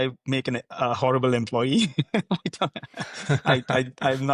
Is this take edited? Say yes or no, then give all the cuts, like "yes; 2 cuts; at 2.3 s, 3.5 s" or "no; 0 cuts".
no; 0 cuts